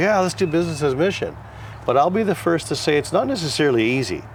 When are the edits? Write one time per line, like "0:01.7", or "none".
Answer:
none